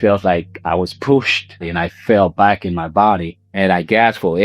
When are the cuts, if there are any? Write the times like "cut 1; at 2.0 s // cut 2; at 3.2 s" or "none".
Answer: cut 1; at 1.5 s // cut 2; at 3.4 s